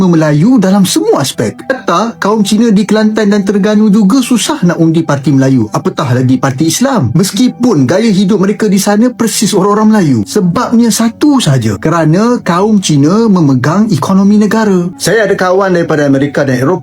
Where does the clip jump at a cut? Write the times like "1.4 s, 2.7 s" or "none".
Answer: 15.0 s